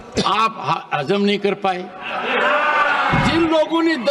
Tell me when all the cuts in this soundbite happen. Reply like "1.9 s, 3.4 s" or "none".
3.1 s